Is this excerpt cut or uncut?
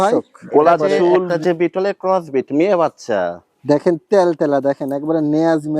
uncut